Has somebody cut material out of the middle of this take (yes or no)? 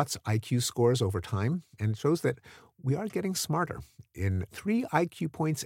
yes